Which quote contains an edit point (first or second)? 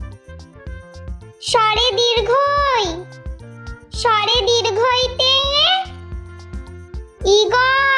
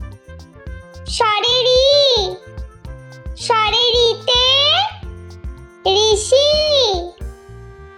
first